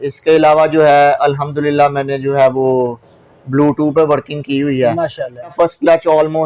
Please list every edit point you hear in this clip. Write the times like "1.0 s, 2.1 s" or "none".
5.5 s